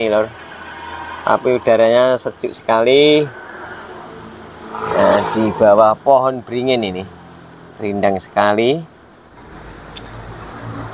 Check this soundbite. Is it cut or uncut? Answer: cut